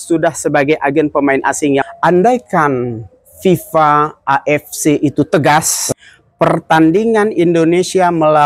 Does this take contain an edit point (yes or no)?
yes